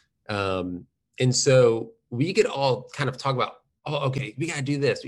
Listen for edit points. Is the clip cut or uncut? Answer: uncut